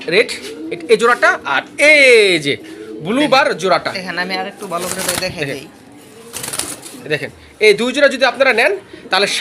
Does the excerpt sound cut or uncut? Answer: uncut